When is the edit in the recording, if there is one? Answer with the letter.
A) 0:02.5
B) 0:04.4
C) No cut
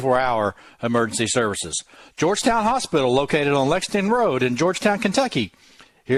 C